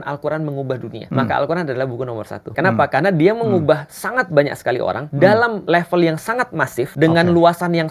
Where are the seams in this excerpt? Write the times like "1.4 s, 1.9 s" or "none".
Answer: 1.0 s, 2.5 s, 5.0 s, 5.6 s, 6.9 s